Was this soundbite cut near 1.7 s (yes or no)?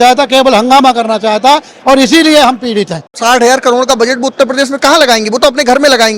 no